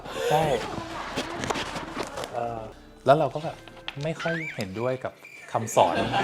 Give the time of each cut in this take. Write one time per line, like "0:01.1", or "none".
0:02.7